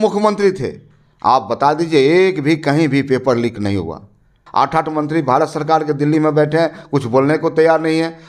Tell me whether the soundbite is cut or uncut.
cut